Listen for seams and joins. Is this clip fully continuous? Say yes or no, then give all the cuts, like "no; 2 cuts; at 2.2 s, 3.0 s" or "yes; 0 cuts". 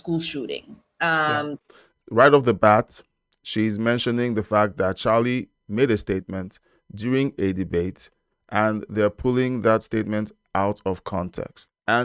yes; 0 cuts